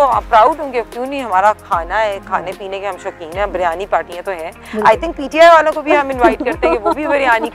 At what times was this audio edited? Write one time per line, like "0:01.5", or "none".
none